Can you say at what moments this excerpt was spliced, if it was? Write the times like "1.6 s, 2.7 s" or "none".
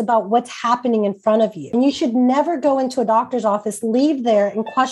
1.7 s